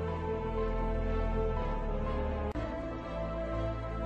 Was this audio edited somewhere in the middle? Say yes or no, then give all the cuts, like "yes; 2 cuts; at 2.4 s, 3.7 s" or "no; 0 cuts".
no; 0 cuts